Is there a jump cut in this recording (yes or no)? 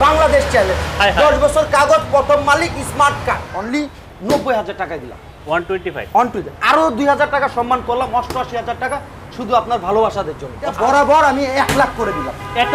yes